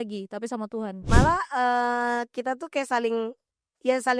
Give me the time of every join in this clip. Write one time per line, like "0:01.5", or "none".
0:01.0